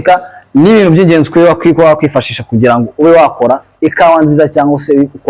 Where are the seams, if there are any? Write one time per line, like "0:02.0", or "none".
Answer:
none